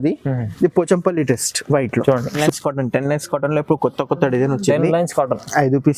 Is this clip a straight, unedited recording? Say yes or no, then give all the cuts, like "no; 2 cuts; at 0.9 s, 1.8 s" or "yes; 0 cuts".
no; 1 cut; at 2.4 s